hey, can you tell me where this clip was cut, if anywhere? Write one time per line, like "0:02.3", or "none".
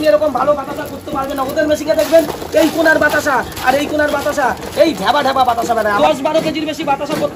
0:05.9

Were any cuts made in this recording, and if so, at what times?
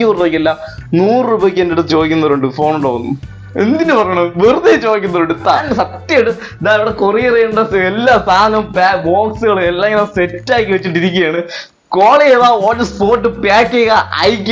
0:05.7

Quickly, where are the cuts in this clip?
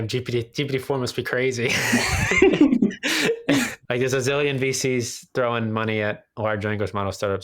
0:03.8

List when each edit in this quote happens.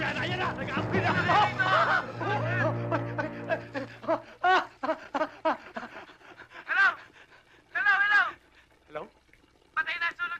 0:02.1

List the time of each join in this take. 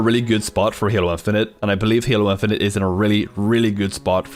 none

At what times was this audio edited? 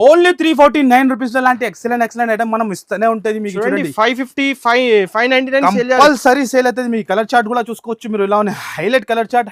none

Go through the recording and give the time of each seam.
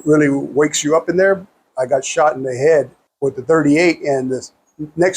0:01.7
0:03.0

